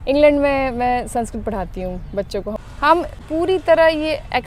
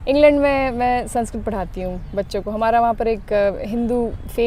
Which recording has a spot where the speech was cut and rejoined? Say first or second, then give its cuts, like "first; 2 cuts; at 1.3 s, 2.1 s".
first; 2 cuts; at 2.6 s, 3.1 s